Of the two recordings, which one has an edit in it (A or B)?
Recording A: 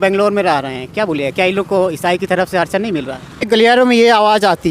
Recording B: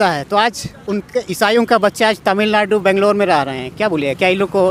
A